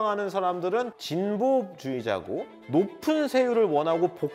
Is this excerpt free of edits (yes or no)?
no